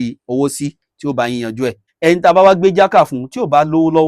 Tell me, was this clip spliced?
yes; 1 cut; at 1.8 s

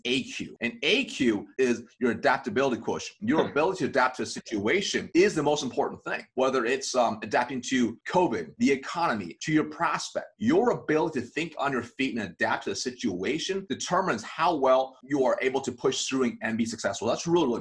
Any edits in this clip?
no; 0 cuts

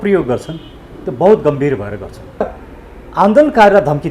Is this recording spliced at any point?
yes; 1 cut; at 2.4 s

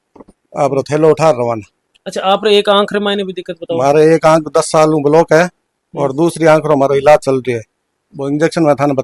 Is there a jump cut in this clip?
no; 0 cuts

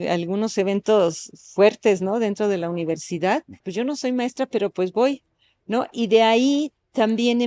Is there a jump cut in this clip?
yes; 1 cut; at 3.6 s

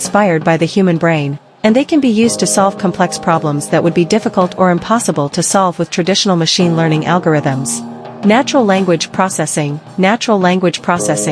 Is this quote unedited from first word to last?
yes; 0 cuts

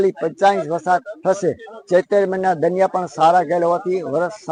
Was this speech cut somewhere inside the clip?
no; 0 cuts

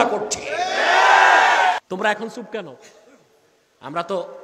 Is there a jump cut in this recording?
yes; 1 cut; at 1.8 s

